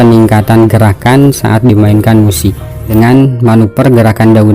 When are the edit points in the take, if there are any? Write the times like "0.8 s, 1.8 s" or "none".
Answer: 2.9 s